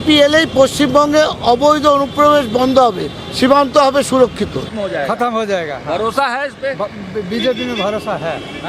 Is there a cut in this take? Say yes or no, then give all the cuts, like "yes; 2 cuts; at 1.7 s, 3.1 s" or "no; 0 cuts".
yes; 1 cut; at 4.7 s